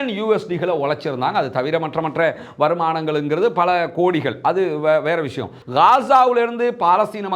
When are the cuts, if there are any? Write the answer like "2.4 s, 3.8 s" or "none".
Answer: 5.6 s